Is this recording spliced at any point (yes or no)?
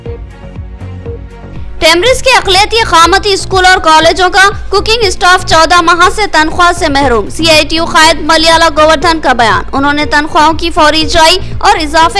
yes